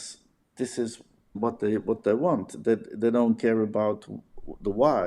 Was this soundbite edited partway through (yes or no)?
yes